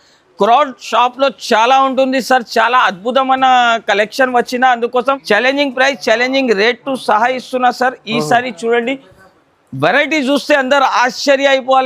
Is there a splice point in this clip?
yes; 1 cut; at 5.2 s

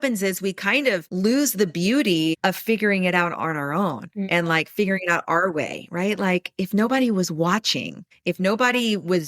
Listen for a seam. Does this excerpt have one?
yes; 2 cuts; at 1.1 s, 2.4 s

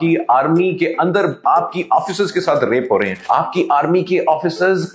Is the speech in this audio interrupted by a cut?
yes; 1 cut; at 3.2 s

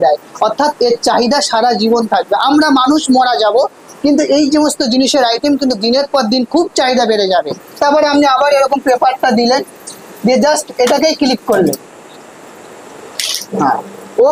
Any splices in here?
yes; 1 cut; at 7.7 s

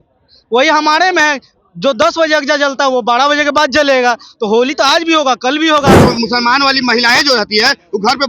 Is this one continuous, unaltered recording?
no; 1 cut; at 6.0 s

